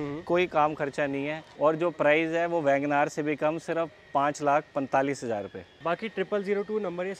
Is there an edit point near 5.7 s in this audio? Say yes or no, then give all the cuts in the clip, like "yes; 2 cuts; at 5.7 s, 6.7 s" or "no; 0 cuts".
yes; 2 cuts; at 1.5 s, 5.7 s